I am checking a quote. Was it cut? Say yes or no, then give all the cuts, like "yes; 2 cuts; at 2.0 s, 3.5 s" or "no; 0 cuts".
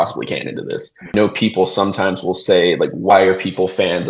yes; 2 cuts; at 1.1 s, 3.1 s